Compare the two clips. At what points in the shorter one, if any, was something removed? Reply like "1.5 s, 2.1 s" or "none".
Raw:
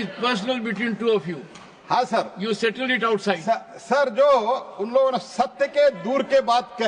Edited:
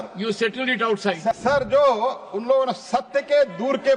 1.4 s

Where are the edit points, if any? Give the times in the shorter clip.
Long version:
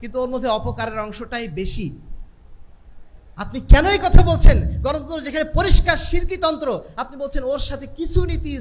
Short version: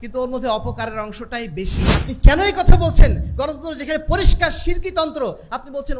1.9 s

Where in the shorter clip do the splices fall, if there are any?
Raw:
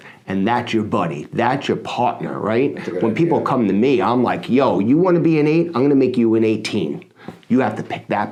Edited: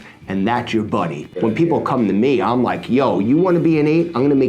1.2 s

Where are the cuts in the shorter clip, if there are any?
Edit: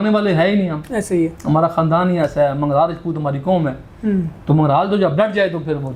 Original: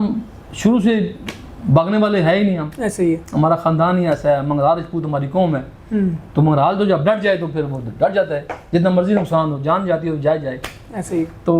none

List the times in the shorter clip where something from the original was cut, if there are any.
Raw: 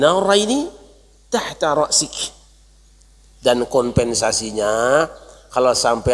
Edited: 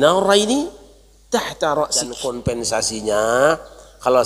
2.2 s

